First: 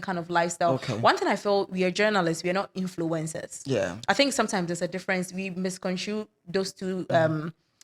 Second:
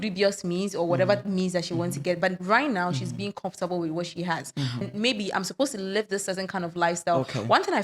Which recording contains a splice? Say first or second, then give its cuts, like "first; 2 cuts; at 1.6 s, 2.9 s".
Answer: second; 1 cut; at 4.8 s